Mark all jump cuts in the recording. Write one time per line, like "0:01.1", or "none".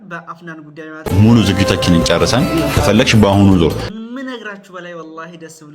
0:01.1
0:03.8